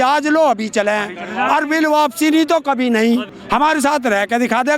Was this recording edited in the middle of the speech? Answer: yes; 1 cut; at 3.3 s

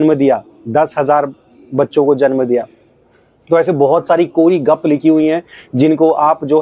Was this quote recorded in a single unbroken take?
yes; 0 cuts

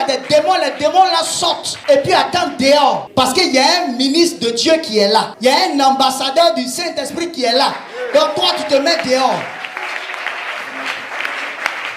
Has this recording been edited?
no; 0 cuts

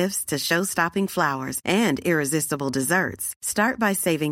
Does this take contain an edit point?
no; 0 cuts

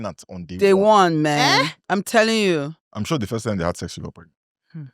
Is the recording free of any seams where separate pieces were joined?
no; 1 cut; at 2.8 s

